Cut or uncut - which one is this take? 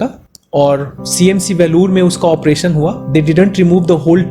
uncut